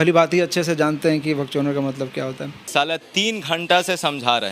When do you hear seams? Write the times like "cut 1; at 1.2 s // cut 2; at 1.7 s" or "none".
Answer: cut 1; at 2.6 s